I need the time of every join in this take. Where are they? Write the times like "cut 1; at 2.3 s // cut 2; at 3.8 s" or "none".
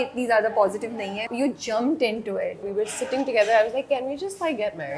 cut 1; at 1.3 s // cut 2; at 2.7 s